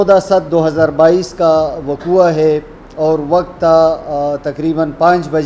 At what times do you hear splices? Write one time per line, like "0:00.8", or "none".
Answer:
none